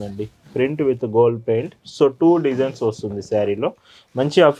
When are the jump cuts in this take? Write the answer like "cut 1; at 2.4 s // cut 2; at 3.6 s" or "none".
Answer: none